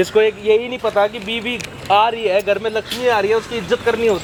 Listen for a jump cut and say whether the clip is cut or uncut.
uncut